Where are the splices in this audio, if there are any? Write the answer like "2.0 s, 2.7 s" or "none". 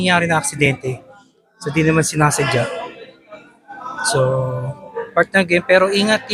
none